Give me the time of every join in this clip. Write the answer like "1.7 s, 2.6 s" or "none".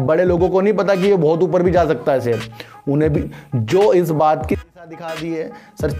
4.6 s